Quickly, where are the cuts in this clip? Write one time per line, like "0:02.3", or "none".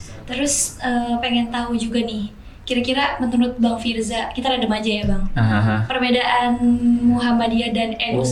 none